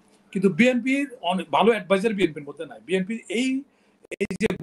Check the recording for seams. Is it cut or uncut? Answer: uncut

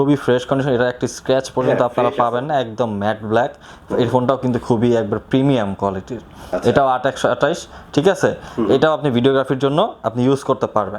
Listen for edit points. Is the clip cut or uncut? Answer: uncut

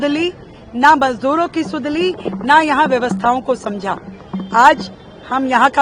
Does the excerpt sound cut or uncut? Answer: uncut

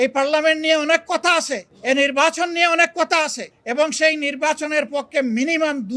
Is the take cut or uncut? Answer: uncut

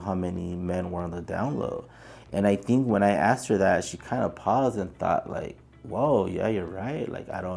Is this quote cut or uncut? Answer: uncut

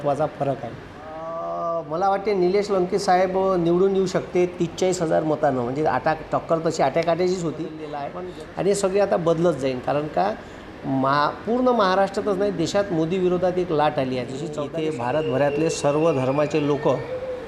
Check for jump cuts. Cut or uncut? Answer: cut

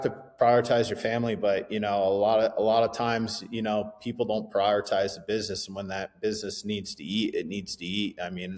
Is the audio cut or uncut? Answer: uncut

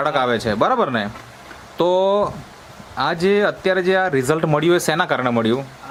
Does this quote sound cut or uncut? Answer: uncut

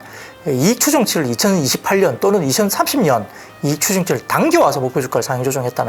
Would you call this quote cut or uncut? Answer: uncut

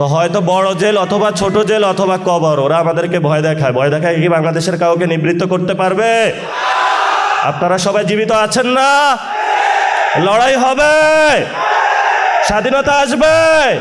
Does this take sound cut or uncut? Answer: uncut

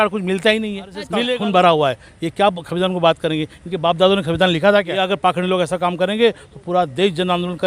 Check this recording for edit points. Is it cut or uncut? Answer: cut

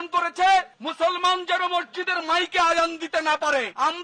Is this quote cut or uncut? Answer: uncut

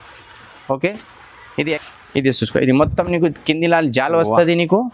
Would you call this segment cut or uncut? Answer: cut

